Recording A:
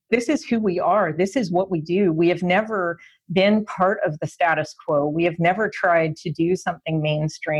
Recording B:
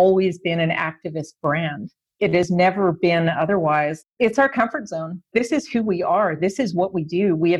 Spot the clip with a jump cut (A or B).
B